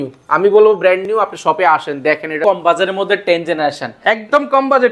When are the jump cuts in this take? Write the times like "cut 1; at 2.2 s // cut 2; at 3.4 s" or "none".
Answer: cut 1; at 2.4 s